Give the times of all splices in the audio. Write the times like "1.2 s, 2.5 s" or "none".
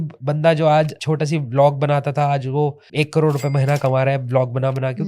1.0 s, 2.8 s